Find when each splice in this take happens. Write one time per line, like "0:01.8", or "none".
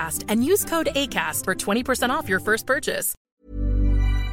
0:03.1